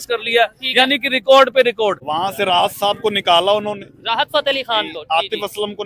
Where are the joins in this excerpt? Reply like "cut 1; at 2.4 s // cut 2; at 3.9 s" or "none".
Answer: cut 1; at 2.1 s